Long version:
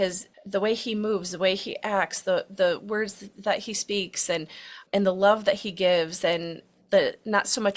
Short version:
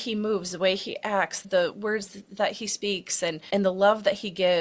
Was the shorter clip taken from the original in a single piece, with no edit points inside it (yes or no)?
no